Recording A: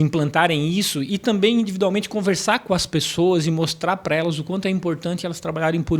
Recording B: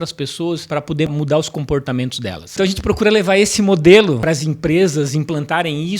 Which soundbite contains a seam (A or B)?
B